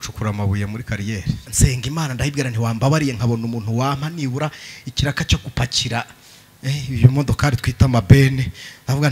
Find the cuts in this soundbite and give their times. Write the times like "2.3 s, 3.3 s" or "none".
1.5 s